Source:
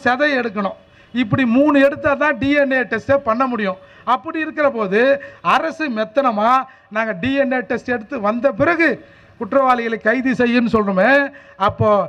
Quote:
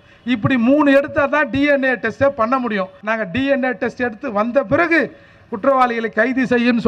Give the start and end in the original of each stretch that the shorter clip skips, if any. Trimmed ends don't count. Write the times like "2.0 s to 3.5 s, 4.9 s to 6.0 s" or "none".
3.9 s to 6.9 s

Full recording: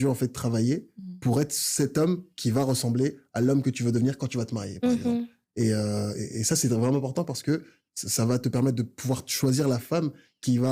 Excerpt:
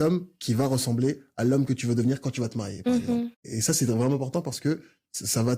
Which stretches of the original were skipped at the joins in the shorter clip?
5.4 s to 6.3 s

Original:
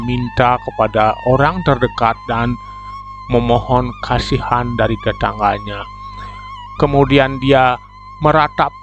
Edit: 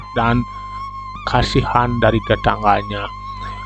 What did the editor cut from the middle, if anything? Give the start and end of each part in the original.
3.3 s to 3.9 s

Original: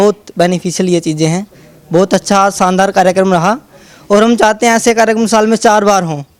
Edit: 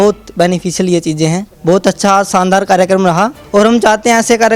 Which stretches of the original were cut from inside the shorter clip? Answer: 1.5 s to 1.8 s, 3.7 s to 4.0 s

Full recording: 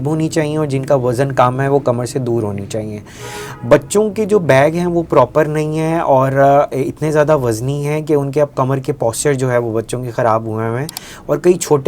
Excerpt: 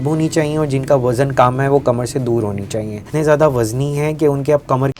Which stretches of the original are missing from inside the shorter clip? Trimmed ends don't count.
3.1 s to 6.9 s

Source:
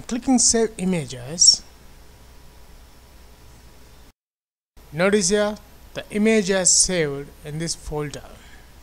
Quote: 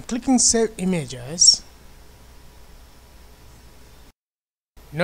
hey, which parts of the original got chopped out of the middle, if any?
none

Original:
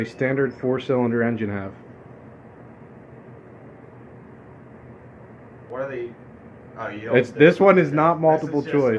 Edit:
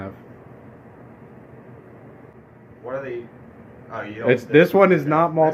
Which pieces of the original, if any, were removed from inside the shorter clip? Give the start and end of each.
4.1 s to 5.4 s

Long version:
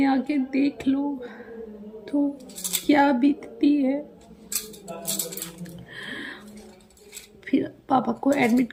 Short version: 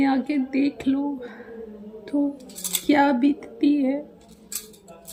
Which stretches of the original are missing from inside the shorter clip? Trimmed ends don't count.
none

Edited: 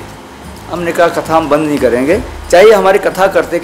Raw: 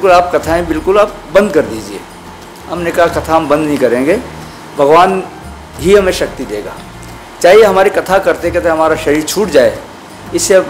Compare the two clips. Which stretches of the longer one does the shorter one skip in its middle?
4.3 s to 7.2 s

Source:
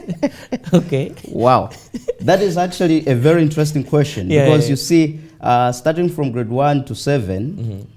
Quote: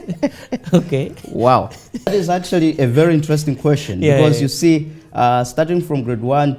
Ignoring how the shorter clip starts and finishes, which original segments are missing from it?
2.1 s to 2.4 s

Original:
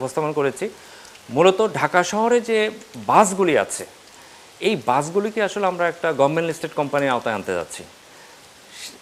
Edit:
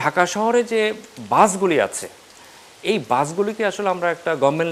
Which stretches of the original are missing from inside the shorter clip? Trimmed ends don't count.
none

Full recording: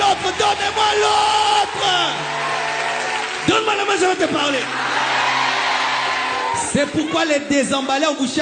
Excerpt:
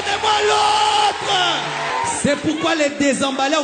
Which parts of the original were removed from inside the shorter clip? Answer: 2.4 s to 6.4 s

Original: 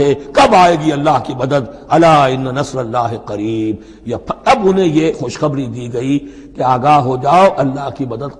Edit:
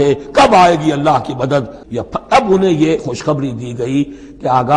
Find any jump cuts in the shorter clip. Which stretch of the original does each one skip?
1.8 s to 3.9 s

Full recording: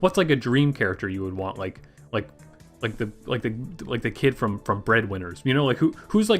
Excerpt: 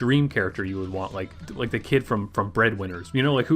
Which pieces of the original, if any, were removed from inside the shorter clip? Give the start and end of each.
1.9 s to 3.7 s

